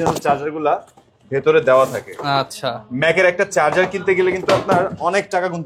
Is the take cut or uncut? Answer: uncut